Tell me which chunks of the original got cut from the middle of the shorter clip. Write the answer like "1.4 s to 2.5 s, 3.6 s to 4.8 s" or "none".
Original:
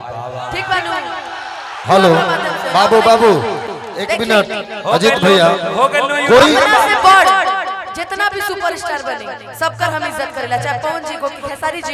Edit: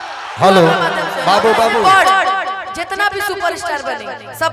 3.2 s to 6.9 s